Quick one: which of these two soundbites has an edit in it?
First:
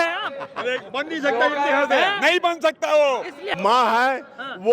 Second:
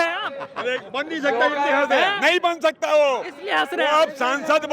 first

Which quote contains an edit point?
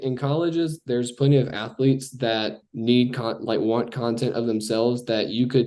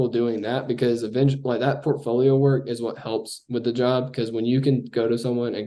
first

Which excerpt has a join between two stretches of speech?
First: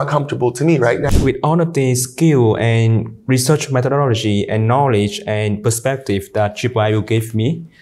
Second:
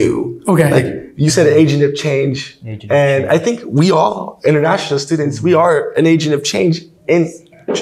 first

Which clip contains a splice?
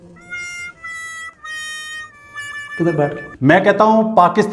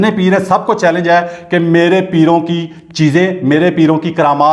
first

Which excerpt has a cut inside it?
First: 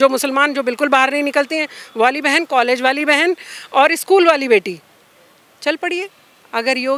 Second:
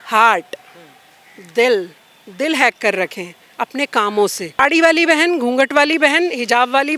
second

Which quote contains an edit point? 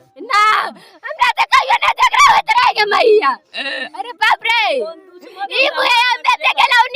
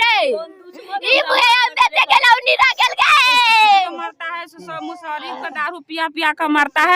second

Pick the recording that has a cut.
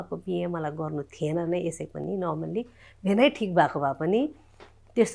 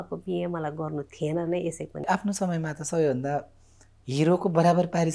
second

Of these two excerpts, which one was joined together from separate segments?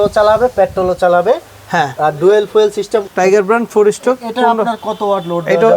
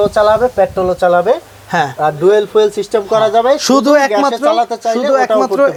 first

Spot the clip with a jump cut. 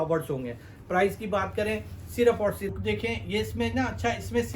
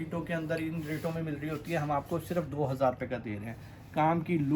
first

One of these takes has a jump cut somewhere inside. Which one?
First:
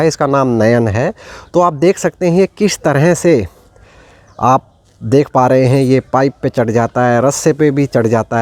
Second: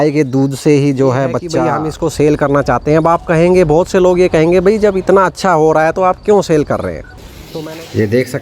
second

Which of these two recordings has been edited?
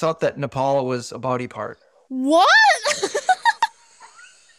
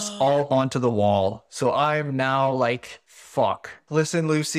second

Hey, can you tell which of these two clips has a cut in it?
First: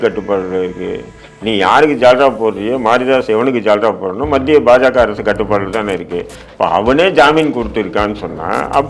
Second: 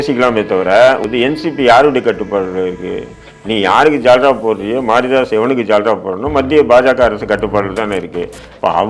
second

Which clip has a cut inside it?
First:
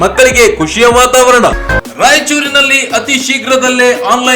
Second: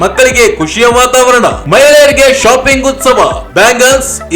first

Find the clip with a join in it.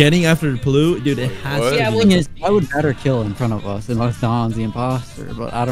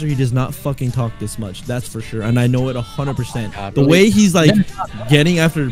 first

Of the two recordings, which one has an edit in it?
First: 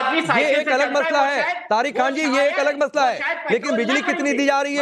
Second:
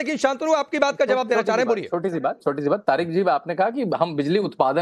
first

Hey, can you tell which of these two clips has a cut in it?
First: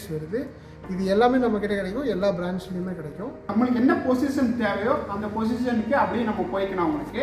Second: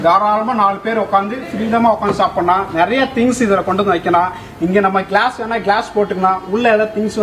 first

